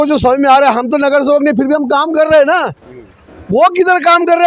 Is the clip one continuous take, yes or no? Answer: yes